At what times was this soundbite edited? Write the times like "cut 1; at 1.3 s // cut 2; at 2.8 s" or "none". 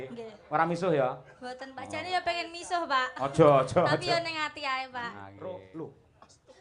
cut 1; at 5.3 s